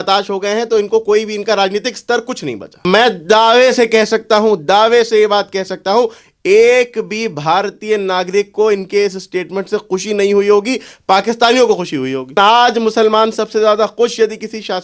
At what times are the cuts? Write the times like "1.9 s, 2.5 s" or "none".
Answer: 2.8 s, 12.4 s